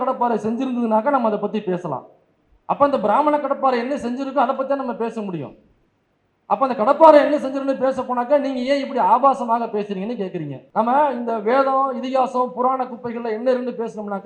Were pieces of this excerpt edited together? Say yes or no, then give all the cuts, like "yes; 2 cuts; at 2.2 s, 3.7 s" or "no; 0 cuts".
yes; 1 cut; at 10.6 s